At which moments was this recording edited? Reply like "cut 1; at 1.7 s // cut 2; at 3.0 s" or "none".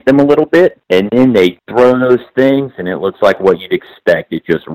cut 1; at 0.8 s // cut 2; at 1.6 s